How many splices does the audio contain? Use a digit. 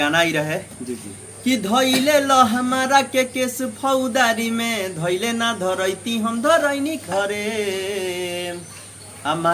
1